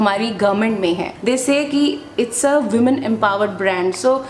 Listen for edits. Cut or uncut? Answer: cut